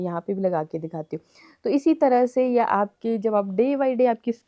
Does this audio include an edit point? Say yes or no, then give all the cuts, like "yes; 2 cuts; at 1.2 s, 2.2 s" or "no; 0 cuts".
no; 0 cuts